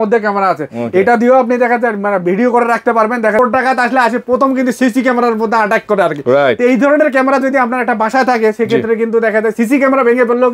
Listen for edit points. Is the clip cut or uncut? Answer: cut